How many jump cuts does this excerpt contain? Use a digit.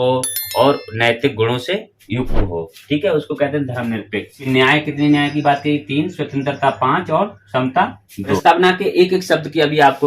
2